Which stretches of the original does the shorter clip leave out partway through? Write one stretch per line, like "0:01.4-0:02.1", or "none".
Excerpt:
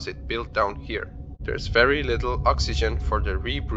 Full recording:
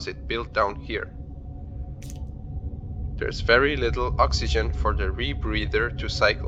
0:01.2-0:03.0